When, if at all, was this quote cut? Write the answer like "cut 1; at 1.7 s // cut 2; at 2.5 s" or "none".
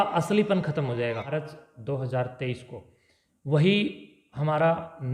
cut 1; at 1.4 s

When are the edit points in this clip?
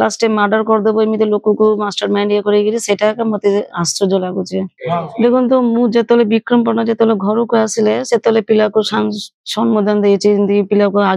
cut 1; at 4.8 s

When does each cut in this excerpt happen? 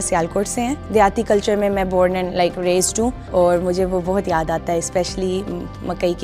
cut 1; at 0.8 s // cut 2; at 3.2 s

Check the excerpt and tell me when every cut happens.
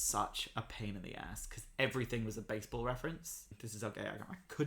cut 1; at 3.6 s

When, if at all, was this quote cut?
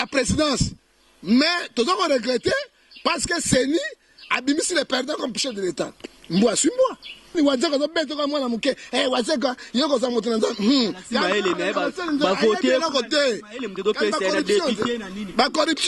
cut 1; at 7.3 s

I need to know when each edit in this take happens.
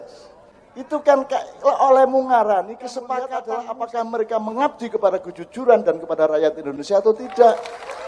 cut 1; at 3.4 s

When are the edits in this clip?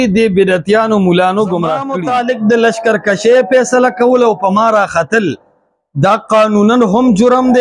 cut 1; at 1.9 s

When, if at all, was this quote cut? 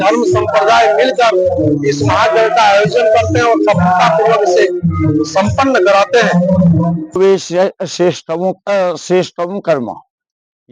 cut 1; at 7.2 s

